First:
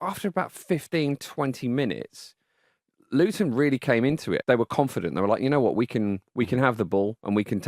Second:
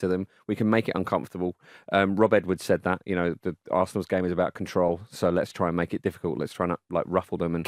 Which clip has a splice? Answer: first; 1 cut; at 4.4 s

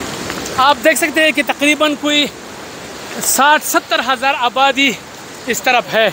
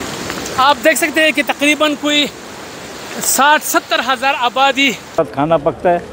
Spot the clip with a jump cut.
second; 1 cut; at 5.1 s

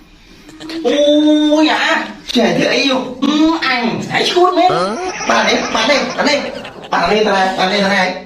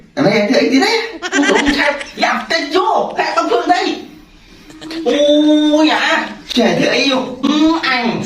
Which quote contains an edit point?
first; 1 cut; at 5.0 s

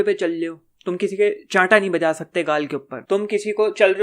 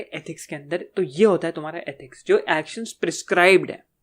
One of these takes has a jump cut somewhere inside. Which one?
first; 1 cut; at 2.9 s

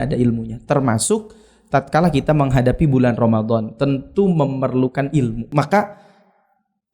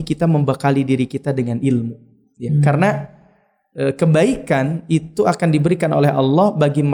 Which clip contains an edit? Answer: first; 1 cut; at 5.4 s

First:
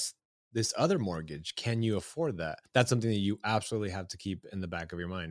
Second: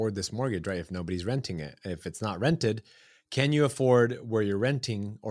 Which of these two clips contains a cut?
first; 1 cut; at 2.6 s

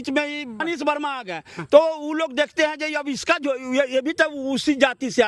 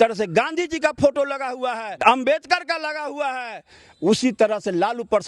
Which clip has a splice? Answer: second; 1 cut; at 1.9 s

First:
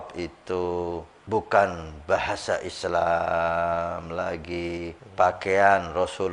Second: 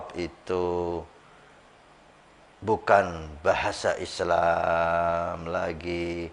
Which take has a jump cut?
first; 2 cuts; at 1.1 s, 5.0 s

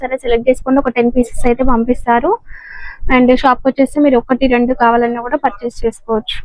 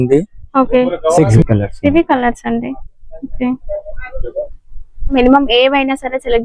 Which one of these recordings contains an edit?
second; 2 cuts; at 1.4 s, 5.0 s

